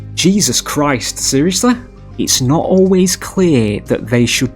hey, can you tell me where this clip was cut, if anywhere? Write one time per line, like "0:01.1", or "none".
0:02.0